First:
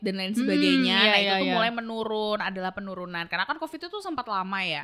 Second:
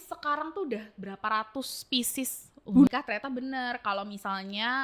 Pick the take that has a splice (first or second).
second